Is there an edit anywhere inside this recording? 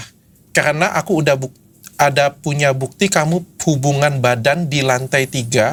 no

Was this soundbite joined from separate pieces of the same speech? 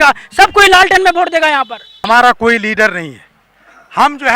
yes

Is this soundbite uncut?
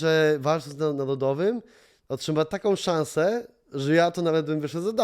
yes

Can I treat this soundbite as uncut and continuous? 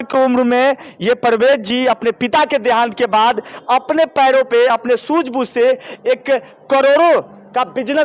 yes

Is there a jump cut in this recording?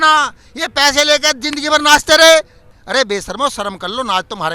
yes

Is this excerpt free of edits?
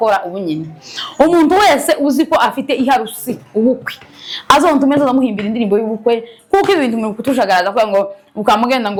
yes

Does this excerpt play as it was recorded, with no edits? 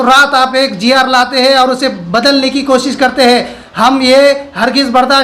yes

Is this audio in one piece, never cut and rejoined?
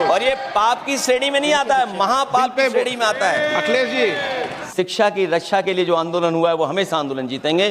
no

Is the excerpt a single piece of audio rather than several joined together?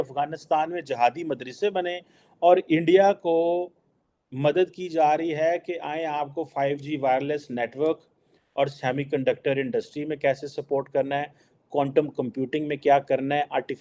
yes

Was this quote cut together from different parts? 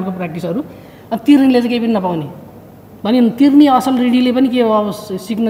no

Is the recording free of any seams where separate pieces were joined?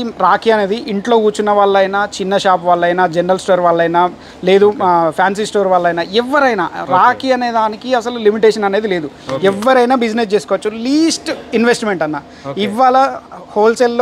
yes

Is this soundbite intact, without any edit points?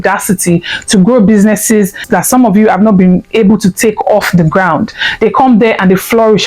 no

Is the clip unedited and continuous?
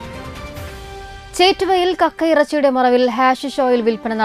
yes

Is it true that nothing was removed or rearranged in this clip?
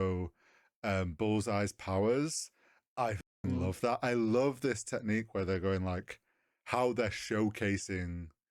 yes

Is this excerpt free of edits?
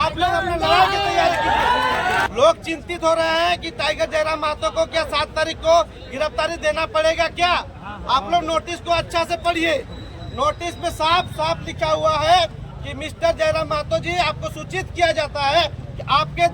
no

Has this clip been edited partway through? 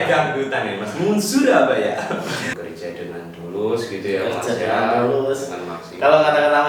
yes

